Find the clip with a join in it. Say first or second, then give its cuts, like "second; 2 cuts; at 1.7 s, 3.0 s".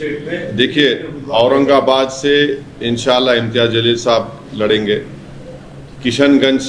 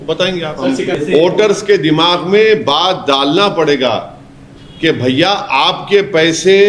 second; 1 cut; at 1.0 s